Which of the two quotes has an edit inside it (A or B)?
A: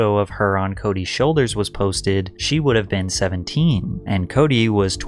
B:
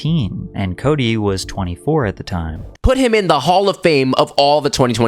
B